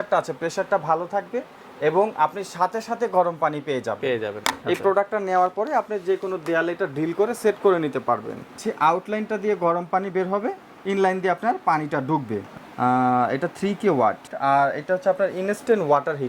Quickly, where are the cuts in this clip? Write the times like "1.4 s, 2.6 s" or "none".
4.4 s, 8.6 s, 12.5 s, 14.3 s